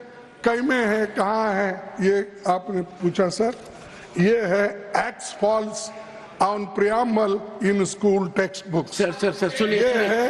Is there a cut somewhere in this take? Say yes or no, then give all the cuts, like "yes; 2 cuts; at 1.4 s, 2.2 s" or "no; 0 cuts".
no; 0 cuts